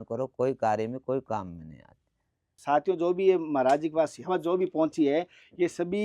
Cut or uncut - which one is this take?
cut